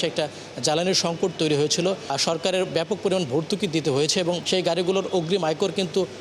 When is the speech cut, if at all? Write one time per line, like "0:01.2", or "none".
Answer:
0:02.2
0:04.4